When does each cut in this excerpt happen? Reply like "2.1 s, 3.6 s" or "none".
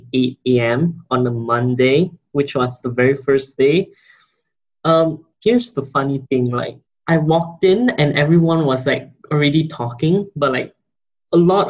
5.3 s